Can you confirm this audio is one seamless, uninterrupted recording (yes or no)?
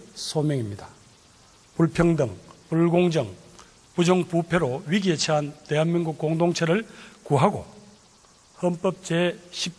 yes